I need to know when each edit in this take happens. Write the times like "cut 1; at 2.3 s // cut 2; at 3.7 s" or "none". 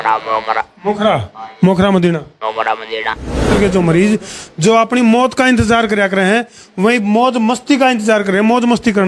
cut 1; at 3.5 s